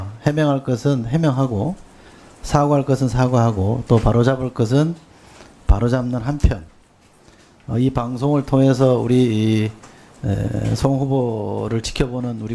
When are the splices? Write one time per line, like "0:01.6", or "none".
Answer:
0:08.2